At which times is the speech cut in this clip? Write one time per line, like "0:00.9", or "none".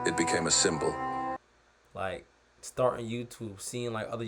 0:01.4